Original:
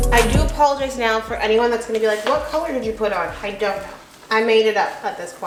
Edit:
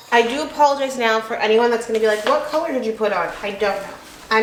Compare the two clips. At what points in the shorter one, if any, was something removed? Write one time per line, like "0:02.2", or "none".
none